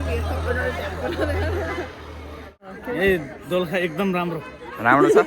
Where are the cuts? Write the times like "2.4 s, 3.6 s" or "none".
2.7 s